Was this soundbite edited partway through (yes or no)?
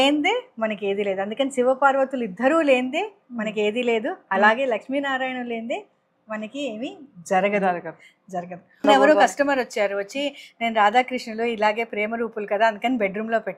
yes